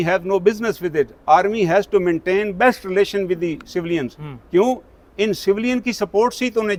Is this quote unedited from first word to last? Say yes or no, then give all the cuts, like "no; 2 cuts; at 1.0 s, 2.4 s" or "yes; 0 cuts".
yes; 0 cuts